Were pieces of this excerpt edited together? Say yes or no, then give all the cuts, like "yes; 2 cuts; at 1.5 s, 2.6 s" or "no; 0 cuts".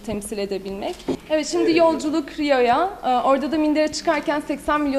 yes; 1 cut; at 1.2 s